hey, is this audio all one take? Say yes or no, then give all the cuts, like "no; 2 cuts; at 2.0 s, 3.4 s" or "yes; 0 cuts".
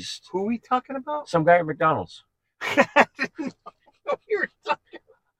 yes; 0 cuts